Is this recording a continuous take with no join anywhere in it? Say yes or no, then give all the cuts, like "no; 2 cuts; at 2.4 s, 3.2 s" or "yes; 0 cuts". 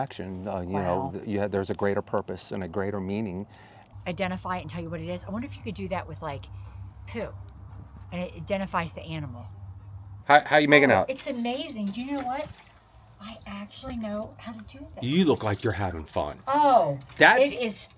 no; 2 cuts; at 3.8 s, 10.1 s